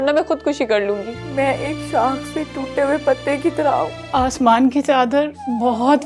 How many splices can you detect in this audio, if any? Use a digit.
2